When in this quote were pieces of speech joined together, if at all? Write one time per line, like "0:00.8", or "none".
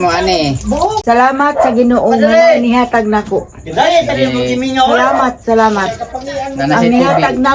0:01.0